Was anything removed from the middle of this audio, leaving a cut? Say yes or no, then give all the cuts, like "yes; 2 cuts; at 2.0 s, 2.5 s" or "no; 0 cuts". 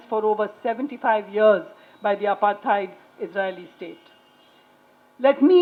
no; 0 cuts